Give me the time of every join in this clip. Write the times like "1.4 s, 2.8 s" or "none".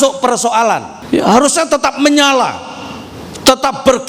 0.9 s